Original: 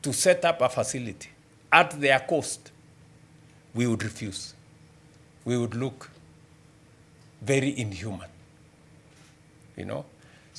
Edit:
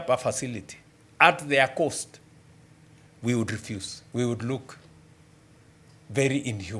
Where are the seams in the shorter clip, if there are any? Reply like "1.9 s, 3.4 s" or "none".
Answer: 3.9 s